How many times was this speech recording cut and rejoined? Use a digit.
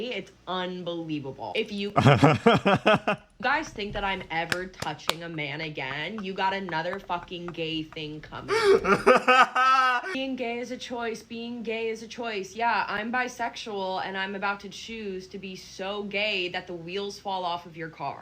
1